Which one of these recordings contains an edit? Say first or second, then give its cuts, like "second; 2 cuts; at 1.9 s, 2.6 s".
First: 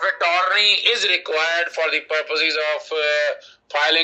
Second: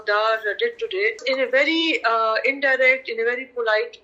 second; 1 cut; at 1.2 s